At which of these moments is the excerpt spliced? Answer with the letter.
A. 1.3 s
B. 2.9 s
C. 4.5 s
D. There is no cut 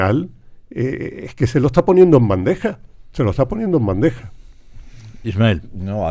D